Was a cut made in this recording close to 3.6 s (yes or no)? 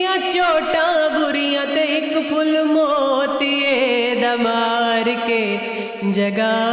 no